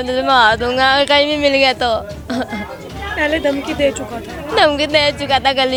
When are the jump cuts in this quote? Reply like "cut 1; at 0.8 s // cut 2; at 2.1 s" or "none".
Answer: none

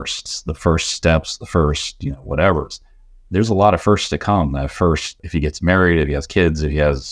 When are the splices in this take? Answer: cut 1; at 5.2 s

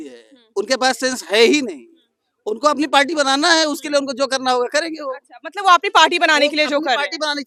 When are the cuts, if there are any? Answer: none

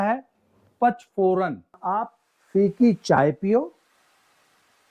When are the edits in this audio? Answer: cut 1; at 1.8 s

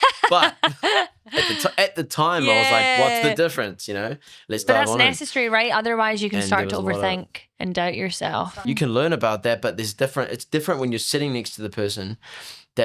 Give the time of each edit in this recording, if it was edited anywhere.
cut 1; at 5.2 s // cut 2; at 8.6 s

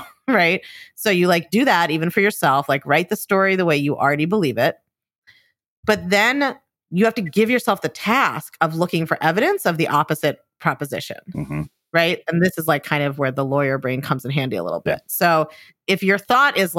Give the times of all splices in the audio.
none

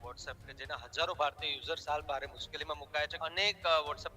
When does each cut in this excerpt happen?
cut 1; at 3.1 s

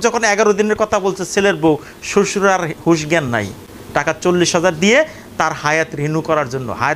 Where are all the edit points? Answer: none

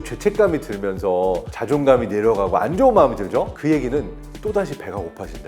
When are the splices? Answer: cut 1; at 1.5 s // cut 2; at 3.5 s // cut 3; at 4.2 s

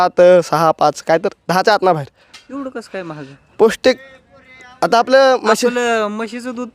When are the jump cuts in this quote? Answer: cut 1; at 2.4 s

